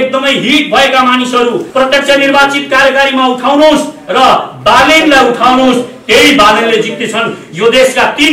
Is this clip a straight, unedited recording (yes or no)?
no